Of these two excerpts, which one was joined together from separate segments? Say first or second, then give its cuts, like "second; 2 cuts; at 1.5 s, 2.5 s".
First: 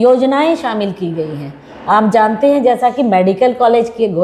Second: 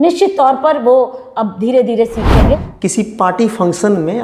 second; 1 cut; at 2.6 s